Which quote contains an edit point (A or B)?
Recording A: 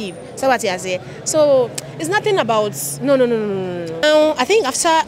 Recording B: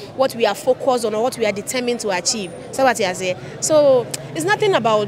A